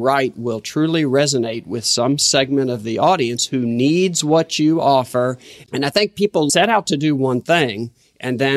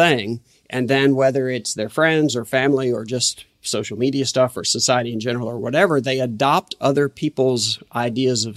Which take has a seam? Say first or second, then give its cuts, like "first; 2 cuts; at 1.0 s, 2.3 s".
first; 2 cuts; at 5.5 s, 6.5 s